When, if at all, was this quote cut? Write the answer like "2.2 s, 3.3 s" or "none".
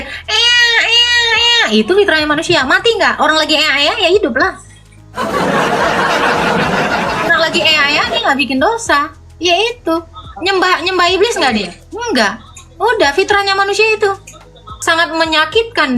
14.7 s

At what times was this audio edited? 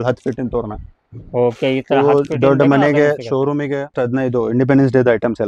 4.0 s

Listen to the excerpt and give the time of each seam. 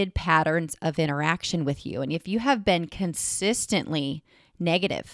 none

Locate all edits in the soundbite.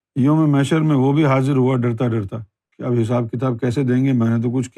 none

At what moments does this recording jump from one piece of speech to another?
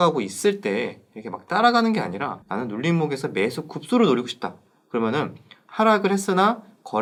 none

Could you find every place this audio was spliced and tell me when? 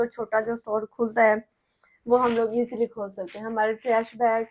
none

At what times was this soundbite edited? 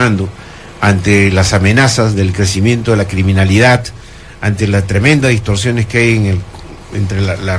5.8 s

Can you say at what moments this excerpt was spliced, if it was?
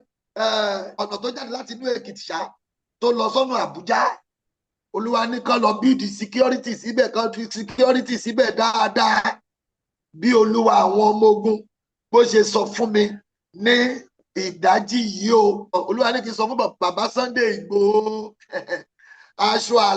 1.0 s, 15.8 s

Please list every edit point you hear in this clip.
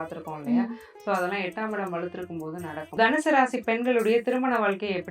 3.0 s

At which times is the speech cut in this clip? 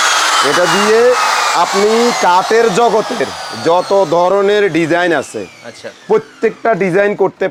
none

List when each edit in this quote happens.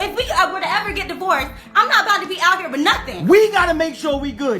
3.1 s

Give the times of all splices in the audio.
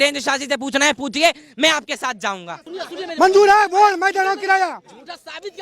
2.6 s

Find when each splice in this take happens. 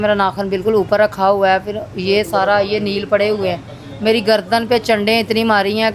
none

